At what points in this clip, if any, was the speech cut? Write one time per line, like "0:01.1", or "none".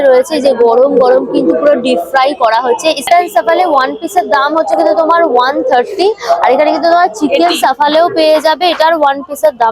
none